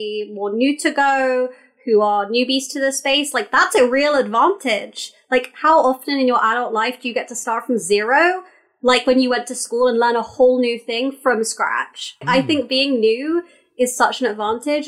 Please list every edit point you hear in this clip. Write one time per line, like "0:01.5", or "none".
0:12.2